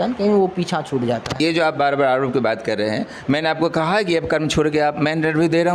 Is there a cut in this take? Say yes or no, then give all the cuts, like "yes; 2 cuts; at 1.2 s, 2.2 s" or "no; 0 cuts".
yes; 1 cut; at 1.3 s